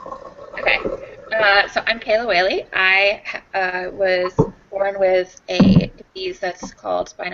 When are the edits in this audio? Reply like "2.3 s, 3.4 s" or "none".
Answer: 1.1 s